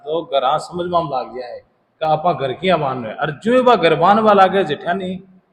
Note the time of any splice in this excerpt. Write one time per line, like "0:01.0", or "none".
none